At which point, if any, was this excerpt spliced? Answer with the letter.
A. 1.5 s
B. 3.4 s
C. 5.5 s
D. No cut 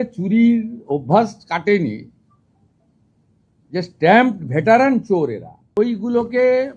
C